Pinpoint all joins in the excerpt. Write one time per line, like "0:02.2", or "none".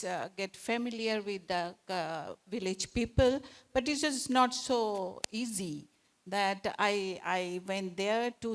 none

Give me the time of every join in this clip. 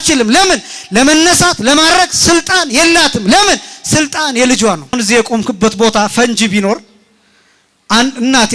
0:05.0

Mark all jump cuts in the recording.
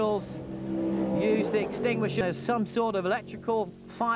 0:02.2

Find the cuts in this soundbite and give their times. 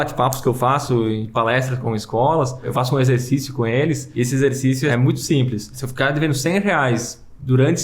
0:01.8
0:02.7
0:04.1
0:04.9
0:05.8

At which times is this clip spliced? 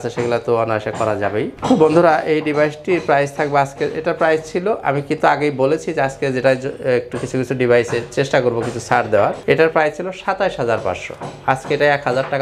none

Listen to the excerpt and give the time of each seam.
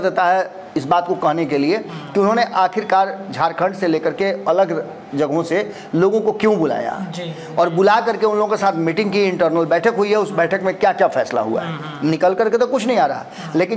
none

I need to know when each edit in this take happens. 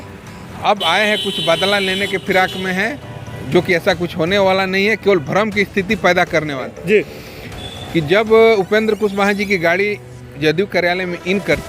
0:06.7

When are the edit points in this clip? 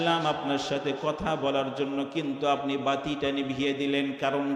none

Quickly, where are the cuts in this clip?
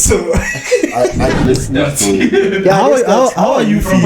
0:01.4

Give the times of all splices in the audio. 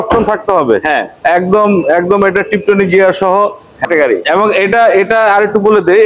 0:03.8

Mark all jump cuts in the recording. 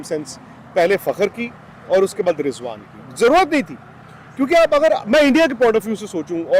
none

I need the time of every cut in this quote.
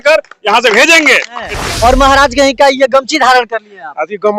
0:01.5

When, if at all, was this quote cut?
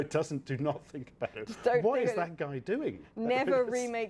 none

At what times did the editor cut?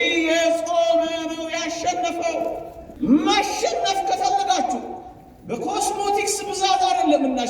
0:02.8

